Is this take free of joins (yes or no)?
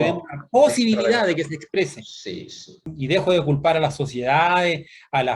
no